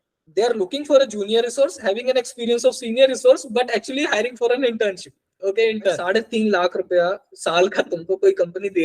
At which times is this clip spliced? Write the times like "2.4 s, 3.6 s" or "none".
6.0 s